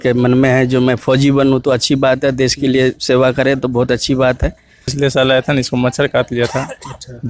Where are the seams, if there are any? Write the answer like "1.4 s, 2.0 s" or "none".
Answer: 4.9 s